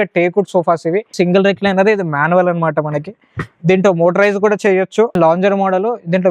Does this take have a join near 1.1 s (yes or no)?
yes